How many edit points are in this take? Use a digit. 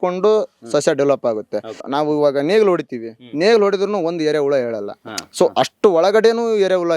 1